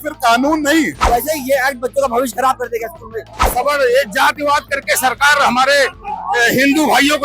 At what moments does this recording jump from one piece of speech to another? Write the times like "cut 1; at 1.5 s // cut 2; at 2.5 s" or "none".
cut 1; at 1.0 s // cut 2; at 3.4 s